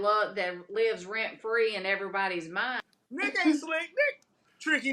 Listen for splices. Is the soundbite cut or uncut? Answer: cut